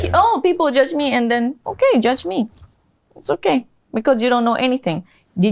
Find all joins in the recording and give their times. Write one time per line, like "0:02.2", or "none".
none